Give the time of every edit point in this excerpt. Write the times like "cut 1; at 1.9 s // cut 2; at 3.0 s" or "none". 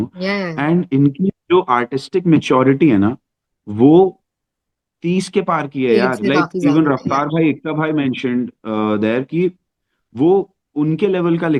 none